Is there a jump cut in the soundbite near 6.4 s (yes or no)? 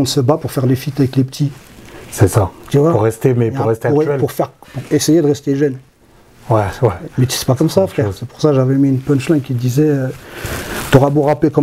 no